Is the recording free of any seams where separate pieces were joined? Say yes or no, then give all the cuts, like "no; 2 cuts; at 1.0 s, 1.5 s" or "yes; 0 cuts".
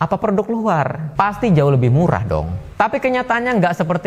no; 1 cut; at 1.1 s